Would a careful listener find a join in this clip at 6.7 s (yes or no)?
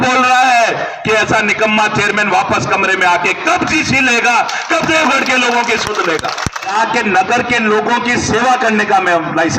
yes